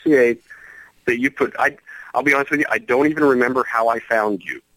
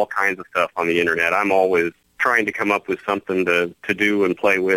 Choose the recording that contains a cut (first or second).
second